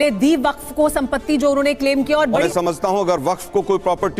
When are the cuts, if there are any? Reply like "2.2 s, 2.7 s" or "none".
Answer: 2.4 s